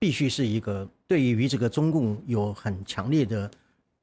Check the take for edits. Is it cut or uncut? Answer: cut